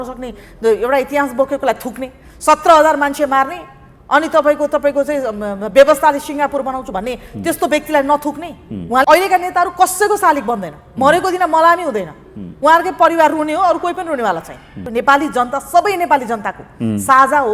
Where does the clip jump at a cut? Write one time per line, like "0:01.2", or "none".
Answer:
0:09.0
0:14.9